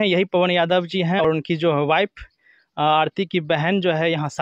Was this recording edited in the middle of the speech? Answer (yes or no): yes